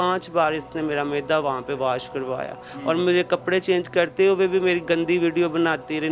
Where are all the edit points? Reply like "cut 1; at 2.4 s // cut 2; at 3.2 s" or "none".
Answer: none